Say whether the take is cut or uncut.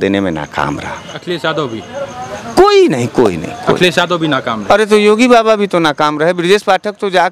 cut